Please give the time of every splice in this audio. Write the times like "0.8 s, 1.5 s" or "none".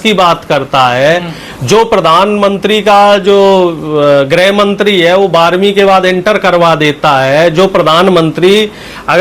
none